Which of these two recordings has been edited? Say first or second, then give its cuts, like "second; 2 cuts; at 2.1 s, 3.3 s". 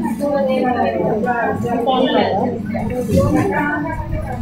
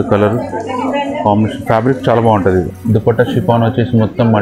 second; 1 cut; at 2.7 s